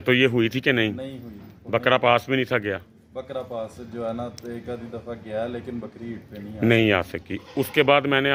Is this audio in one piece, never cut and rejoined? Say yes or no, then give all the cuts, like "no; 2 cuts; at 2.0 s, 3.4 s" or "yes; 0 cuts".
yes; 0 cuts